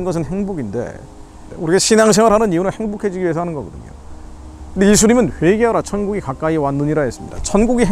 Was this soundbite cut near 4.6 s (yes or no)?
no